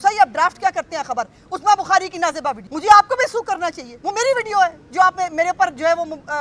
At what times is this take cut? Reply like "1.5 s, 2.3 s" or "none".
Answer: 2.7 s, 3.9 s